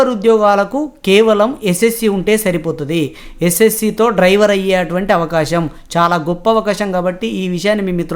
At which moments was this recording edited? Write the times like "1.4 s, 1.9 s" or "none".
none